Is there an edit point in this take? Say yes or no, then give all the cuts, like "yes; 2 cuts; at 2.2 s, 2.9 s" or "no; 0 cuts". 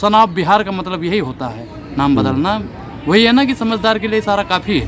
no; 0 cuts